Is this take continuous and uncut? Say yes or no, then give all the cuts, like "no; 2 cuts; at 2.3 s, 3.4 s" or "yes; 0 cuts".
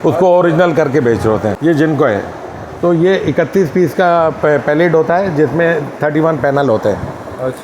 no; 1 cut; at 1.6 s